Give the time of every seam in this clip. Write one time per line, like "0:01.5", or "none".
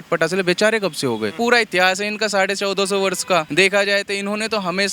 0:01.4
0:03.5